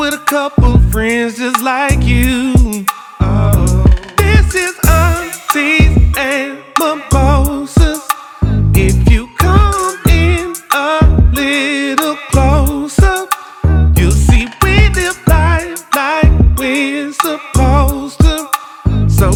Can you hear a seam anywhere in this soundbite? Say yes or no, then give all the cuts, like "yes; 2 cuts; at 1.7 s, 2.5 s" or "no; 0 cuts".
no; 0 cuts